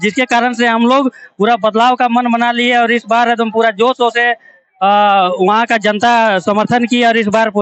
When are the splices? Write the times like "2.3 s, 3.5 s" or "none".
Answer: none